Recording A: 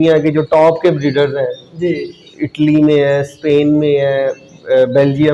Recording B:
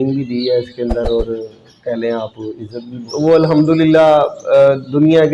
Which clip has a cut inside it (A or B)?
B